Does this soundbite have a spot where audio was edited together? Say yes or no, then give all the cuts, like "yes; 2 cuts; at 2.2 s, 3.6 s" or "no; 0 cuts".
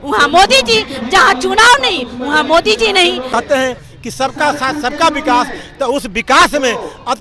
yes; 1 cut; at 3.3 s